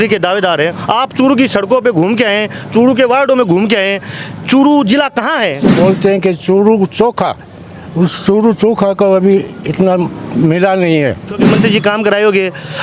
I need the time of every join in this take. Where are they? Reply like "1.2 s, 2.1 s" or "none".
5.7 s, 11.4 s